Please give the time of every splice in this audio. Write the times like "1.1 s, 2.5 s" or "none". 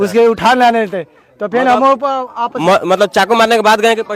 none